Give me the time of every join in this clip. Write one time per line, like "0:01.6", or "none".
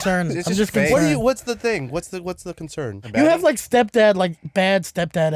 0:03.0

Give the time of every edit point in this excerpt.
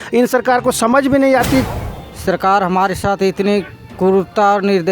0:01.7

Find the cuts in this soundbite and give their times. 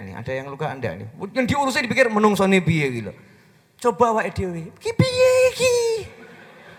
none

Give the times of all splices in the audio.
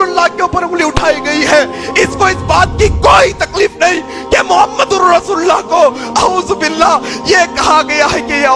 none

